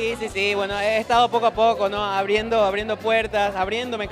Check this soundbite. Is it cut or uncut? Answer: uncut